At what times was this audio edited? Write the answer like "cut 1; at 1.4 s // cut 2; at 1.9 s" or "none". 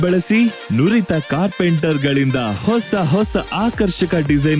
none